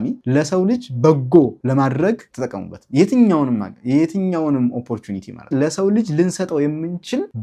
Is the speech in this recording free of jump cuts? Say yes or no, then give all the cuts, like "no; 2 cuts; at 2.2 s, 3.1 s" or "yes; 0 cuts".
no; 1 cut; at 5.4 s